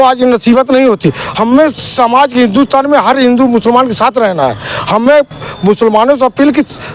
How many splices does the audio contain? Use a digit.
0